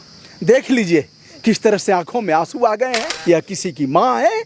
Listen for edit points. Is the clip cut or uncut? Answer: cut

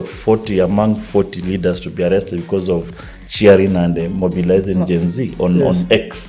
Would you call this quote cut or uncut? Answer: uncut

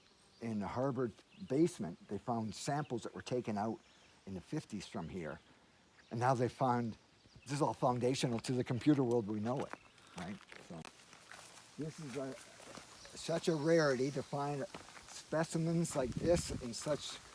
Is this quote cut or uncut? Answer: cut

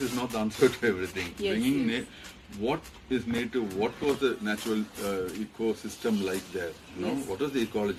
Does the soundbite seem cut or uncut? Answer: uncut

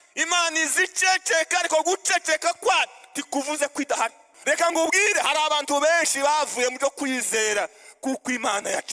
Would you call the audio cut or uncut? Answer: cut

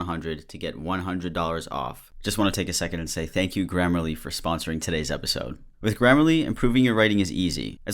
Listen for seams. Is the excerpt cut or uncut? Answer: cut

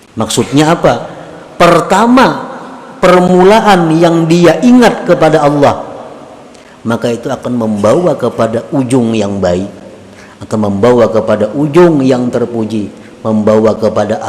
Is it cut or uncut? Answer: uncut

